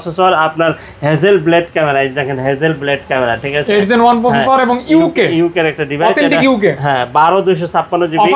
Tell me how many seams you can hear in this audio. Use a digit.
0